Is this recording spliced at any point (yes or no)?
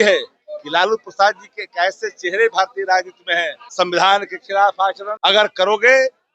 yes